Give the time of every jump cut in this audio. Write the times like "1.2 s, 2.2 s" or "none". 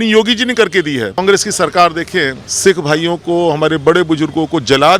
1.2 s, 2.4 s